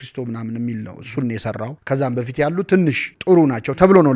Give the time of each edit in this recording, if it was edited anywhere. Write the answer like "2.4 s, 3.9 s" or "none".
1.8 s, 3.1 s